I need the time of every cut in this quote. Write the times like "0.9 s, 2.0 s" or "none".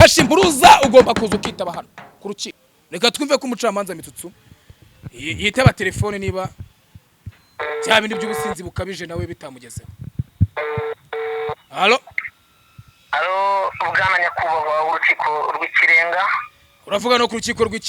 2.5 s, 11.7 s